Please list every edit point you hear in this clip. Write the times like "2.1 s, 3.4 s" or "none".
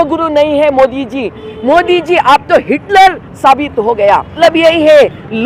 4.3 s